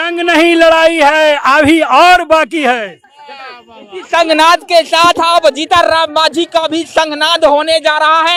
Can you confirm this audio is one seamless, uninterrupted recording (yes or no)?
yes